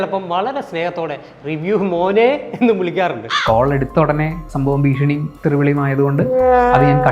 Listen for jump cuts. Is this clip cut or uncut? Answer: uncut